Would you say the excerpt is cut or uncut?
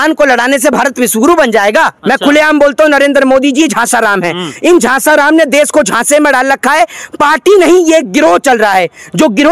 cut